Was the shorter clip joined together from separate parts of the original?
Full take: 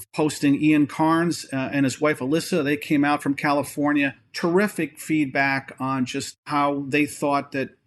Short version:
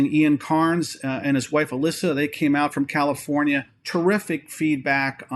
no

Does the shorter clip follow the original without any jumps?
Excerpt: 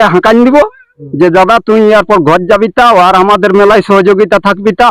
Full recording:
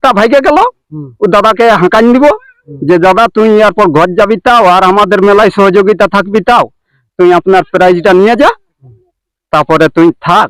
yes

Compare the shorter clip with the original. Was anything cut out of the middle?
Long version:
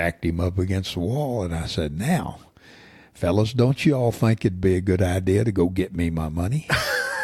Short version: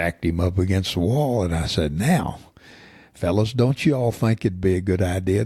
no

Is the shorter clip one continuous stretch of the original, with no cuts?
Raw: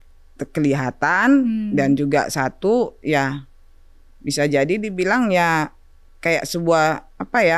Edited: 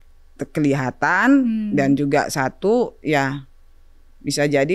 yes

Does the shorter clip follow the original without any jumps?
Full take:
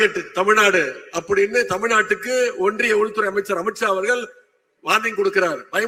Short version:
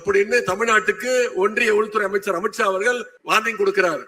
no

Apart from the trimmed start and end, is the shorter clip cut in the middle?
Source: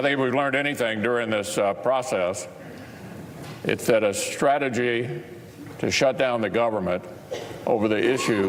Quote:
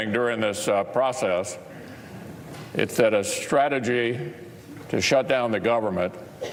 no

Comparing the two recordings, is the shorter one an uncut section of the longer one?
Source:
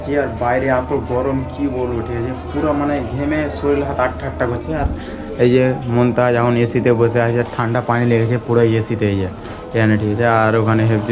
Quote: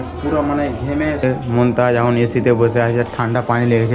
no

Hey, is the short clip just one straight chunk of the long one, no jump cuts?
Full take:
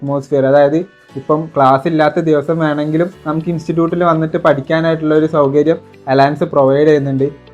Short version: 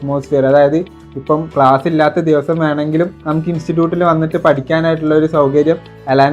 yes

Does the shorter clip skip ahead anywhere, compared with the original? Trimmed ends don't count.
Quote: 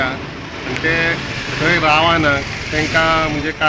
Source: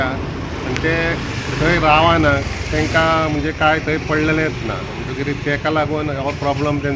no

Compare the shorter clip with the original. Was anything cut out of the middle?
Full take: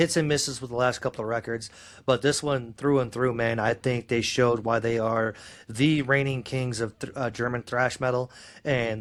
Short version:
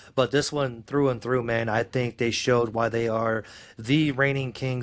no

